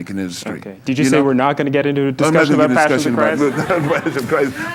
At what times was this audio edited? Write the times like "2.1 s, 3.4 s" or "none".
none

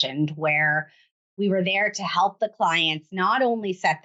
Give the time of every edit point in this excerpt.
none

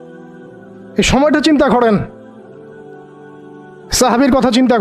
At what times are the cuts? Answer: 1.0 s, 2.6 s, 3.9 s

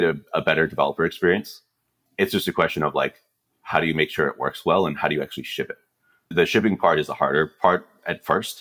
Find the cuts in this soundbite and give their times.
1.9 s, 6.3 s

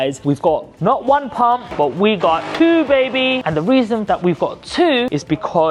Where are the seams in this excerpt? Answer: none

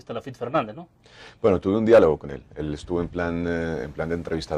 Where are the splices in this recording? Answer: 3.2 s

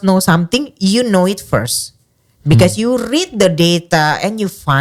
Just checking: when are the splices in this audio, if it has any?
none

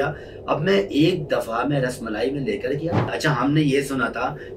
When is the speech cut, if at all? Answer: 3.1 s

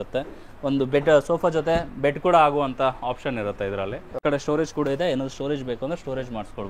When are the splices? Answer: 4.2 s

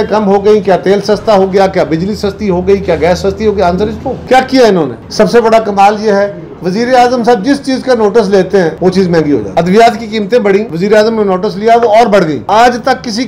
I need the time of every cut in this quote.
none

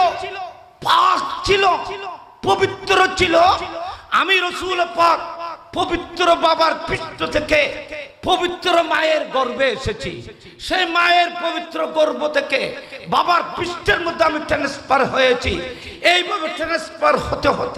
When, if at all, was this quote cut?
none

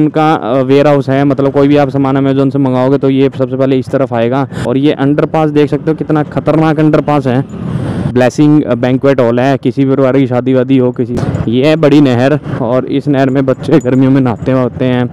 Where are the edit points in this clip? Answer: 4.6 s, 8.1 s, 11.1 s

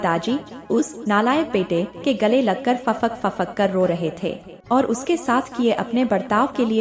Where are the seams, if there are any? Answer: none

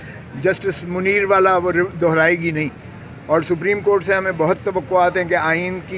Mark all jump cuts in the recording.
none

